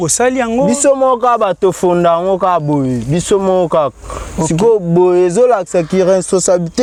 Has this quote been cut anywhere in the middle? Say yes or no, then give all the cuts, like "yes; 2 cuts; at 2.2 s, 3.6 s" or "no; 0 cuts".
no; 0 cuts